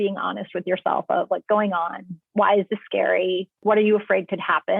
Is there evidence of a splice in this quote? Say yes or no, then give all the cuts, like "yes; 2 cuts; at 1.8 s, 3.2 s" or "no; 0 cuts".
yes; 2 cuts; at 1.4 s, 3.6 s